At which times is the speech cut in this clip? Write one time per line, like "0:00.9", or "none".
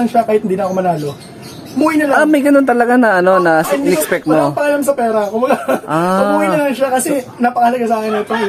none